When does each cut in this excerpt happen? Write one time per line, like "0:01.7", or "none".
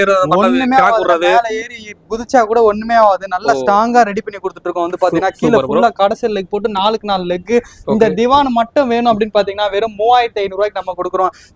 none